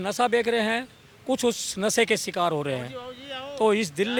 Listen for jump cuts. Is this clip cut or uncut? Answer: uncut